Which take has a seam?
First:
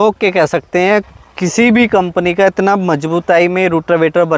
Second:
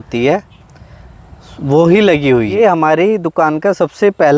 second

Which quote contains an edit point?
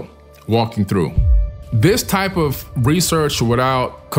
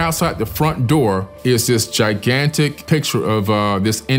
first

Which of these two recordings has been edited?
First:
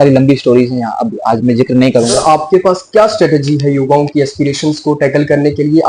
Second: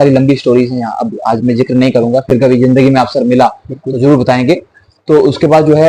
first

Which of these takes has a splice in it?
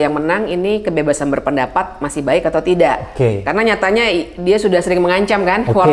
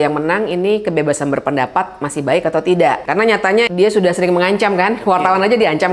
second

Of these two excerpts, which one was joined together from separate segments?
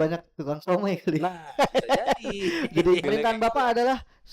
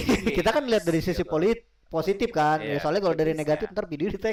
first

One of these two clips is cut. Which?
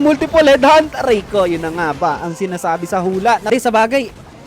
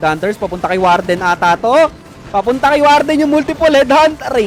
first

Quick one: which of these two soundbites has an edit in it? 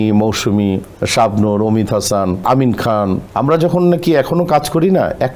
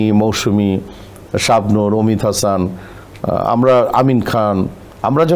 first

